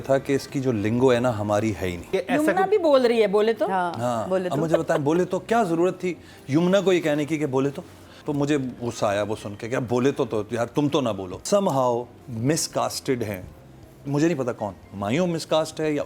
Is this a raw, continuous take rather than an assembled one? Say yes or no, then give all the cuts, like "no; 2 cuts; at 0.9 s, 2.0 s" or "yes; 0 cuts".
no; 4 cuts; at 2.1 s, 8.1 s, 11.3 s, 12.2 s